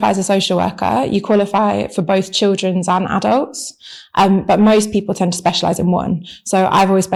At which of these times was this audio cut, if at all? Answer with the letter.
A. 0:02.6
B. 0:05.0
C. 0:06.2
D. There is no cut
D